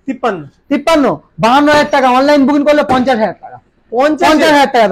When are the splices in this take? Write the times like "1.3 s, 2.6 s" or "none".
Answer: none